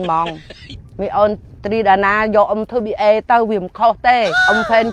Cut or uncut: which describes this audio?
uncut